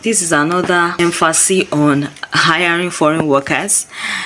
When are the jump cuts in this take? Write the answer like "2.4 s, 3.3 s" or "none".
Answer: 0.9 s